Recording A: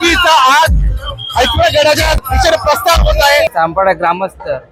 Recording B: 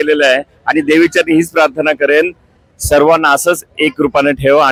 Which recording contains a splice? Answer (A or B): A